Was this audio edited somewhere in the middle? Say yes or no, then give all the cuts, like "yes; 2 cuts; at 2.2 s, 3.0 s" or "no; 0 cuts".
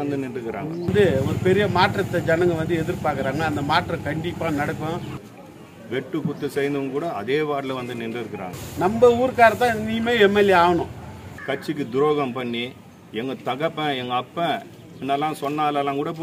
yes; 4 cuts; at 0.9 s, 5.4 s, 8.6 s, 11.3 s